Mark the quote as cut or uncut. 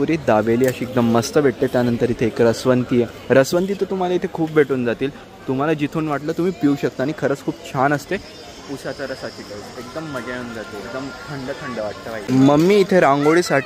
uncut